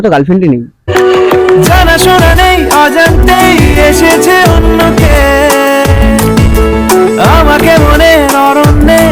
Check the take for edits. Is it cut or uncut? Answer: uncut